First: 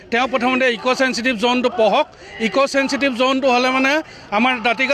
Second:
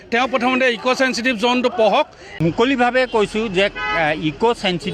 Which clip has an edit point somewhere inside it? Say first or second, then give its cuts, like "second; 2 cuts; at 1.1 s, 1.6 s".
second; 1 cut; at 2.2 s